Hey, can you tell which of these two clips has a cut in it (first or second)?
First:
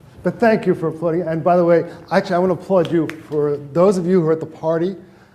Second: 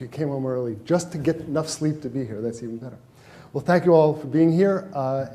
first